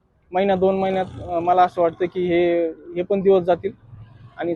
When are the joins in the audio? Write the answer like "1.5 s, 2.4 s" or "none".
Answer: none